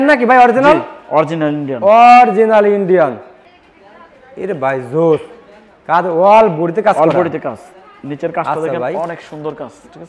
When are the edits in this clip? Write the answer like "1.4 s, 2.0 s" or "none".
3.4 s